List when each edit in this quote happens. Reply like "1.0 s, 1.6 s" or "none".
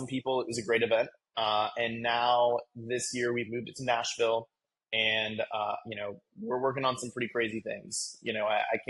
none

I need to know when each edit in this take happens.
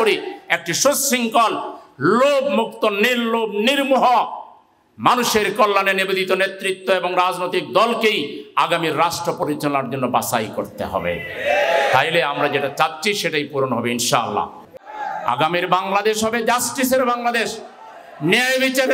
14.6 s

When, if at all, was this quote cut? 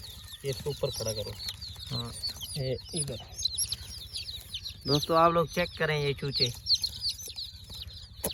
none

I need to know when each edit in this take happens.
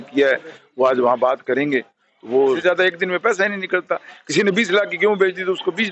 2.6 s

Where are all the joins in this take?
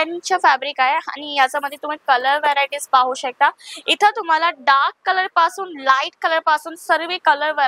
none

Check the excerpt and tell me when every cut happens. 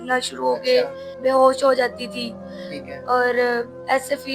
1.0 s

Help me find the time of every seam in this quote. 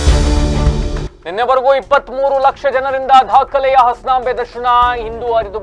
1.1 s

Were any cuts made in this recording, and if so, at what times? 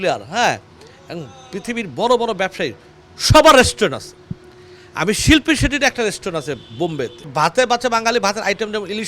7.3 s

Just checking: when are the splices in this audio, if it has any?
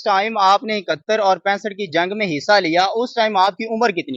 none

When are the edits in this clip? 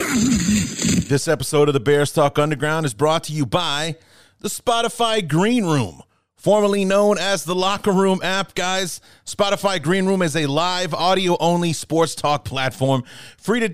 1.0 s

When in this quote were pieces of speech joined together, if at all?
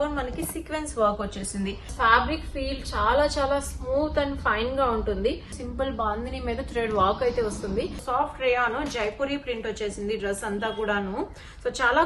1.9 s, 5.5 s, 8.0 s

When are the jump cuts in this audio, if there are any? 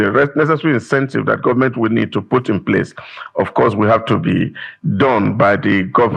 none

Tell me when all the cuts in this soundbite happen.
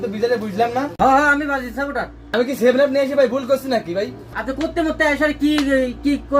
none

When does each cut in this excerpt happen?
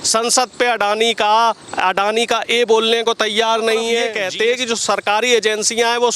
4.1 s

